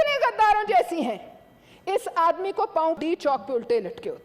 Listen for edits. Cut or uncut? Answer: cut